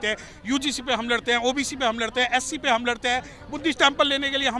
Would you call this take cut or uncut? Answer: uncut